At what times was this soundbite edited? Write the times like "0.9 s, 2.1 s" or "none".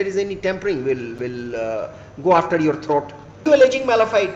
3.4 s